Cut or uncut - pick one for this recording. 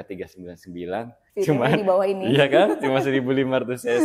cut